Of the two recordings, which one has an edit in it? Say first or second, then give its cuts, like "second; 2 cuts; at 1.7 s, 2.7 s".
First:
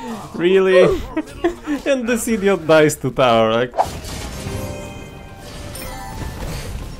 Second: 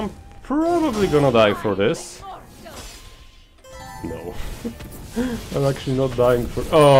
first; 1 cut; at 3.9 s